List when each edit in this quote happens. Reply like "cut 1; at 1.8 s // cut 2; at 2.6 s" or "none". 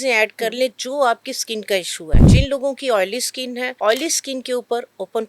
cut 1; at 2.2 s // cut 2; at 3.7 s